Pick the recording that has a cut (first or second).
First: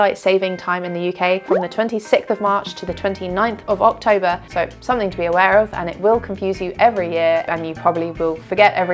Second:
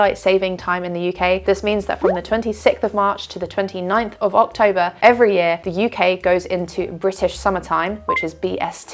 first